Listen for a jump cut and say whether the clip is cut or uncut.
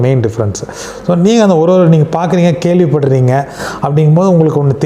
uncut